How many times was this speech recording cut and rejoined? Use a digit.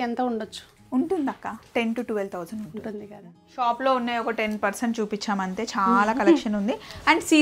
1